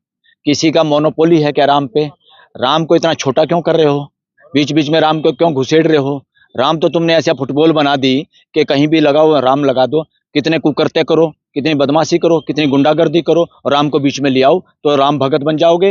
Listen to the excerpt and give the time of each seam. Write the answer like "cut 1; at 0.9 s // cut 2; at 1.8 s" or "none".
none